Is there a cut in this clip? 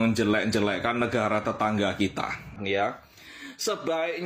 yes; 1 cut; at 2.6 s

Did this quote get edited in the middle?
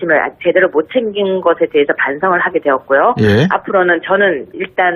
no; 0 cuts

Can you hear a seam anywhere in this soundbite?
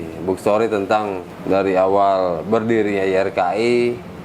yes; 1 cut; at 1.3 s

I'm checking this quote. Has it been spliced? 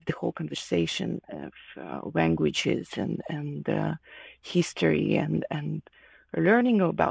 no; 0 cuts

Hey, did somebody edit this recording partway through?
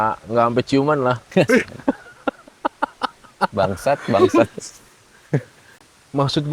yes; 1 cut; at 5.6 s

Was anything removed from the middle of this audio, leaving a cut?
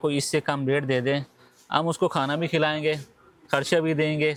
no; 0 cuts

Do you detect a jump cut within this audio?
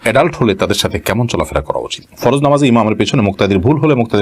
yes; 1 cut; at 2.0 s

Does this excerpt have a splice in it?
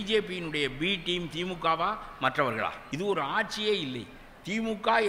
yes; 1 cut; at 2.8 s

